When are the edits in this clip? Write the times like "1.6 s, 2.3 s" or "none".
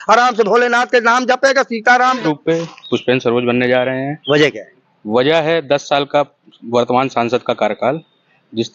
2.2 s